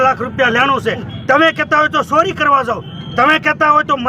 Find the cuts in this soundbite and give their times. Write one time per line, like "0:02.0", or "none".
0:01.1